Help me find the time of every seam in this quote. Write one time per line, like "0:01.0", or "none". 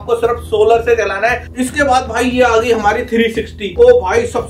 0:01.4
0:03.6

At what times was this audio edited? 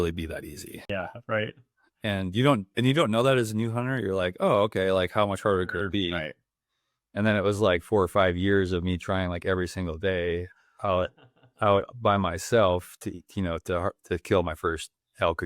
0:00.9

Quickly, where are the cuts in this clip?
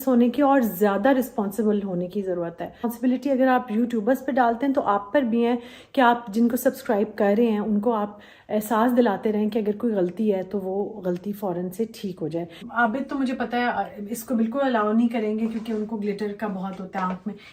0:02.8
0:12.6

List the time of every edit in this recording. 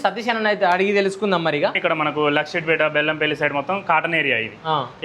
0:01.7

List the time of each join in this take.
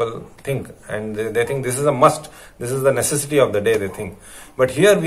none

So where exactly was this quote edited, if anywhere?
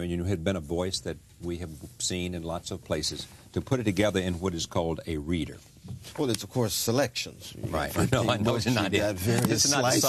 0:04.4

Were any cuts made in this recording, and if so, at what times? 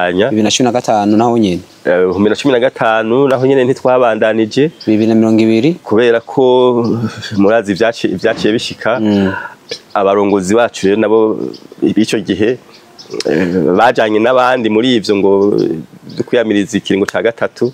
none

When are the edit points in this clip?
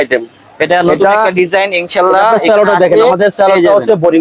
none

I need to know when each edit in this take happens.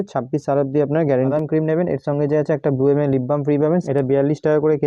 0:01.3
0:03.8

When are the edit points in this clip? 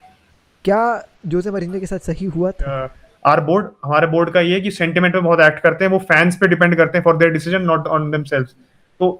0:03.0

